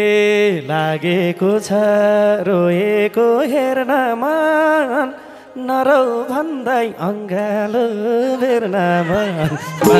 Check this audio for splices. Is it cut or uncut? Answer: uncut